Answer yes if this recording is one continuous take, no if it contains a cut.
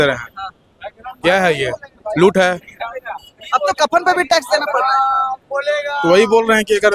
yes